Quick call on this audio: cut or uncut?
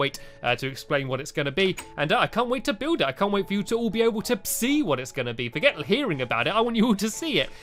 uncut